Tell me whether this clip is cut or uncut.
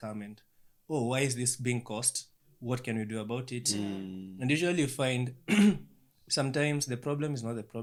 uncut